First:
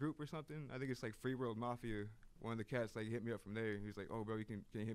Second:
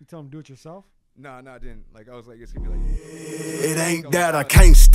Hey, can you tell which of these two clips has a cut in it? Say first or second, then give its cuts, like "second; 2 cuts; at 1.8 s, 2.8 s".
second; 1 cut; at 2.5 s